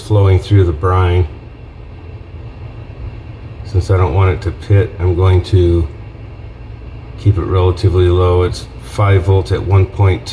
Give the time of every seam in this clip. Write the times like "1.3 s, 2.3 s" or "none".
none

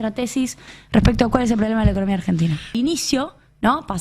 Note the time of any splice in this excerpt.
2.7 s

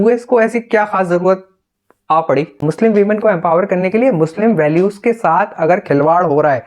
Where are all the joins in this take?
2.6 s

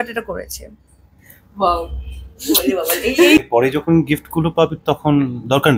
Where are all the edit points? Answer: 3.4 s

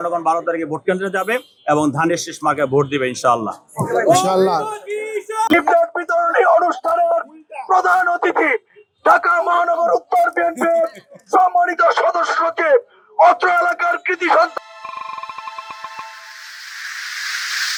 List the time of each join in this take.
none

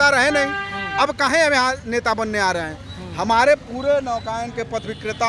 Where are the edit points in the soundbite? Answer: none

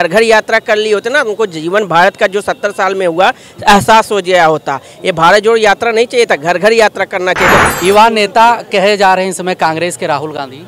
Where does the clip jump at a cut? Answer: 7.6 s

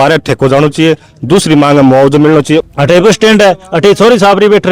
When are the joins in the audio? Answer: 2.6 s

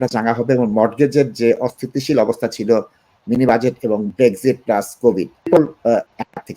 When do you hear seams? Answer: 4.1 s, 5.4 s

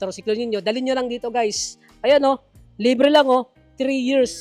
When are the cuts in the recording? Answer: none

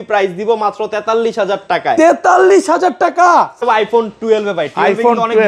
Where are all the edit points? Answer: 3.6 s

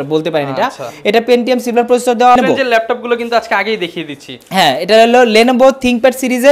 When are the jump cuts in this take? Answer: 2.4 s

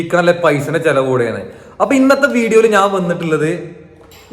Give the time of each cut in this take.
none

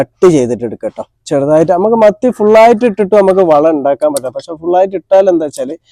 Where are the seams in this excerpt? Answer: none

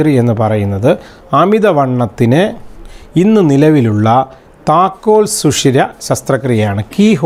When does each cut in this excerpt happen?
none

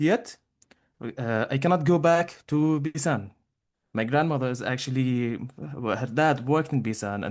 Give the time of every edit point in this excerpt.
none

